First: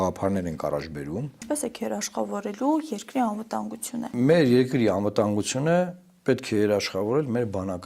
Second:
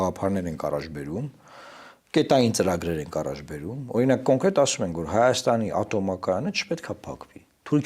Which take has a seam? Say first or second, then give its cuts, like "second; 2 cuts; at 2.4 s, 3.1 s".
first; 2 cuts; at 1.4 s, 4.1 s